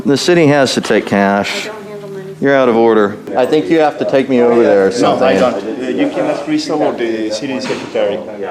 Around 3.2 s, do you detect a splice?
yes; 1 cut; at 3.2 s

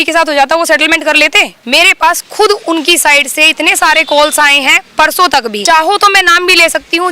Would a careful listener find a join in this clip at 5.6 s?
yes; 2 cuts; at 1.5 s, 5.6 s

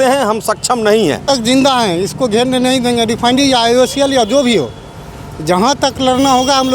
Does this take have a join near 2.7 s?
no; 1 cut; at 1.2 s

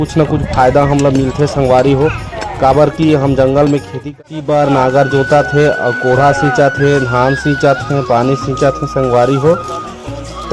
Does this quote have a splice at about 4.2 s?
yes; 1 cut; at 4.2 s

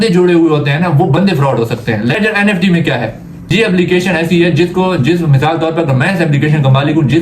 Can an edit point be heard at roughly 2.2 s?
yes; 2 cuts; at 2.2 s, 3.4 s

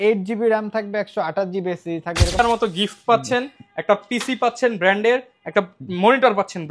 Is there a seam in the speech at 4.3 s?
no; 1 cut; at 2.4 s

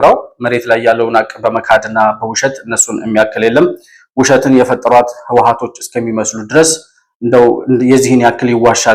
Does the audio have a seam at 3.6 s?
no; 0 cuts

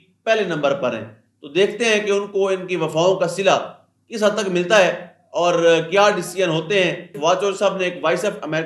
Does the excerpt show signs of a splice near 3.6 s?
no; 1 cut; at 7.1 s

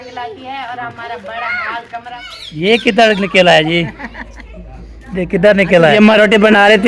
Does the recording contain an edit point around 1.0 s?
no; 2 cuts; at 2.2 s, 5.9 s

